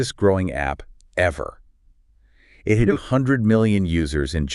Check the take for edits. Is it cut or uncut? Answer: uncut